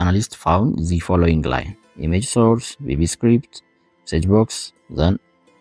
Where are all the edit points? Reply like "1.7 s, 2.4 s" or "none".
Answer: none